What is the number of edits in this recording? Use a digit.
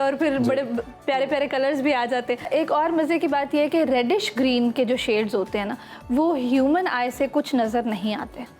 1